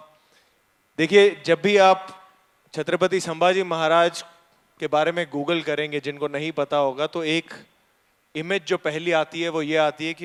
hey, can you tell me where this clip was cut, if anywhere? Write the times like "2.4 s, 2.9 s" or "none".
none